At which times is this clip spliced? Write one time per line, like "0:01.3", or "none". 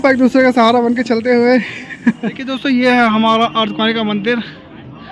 0:02.6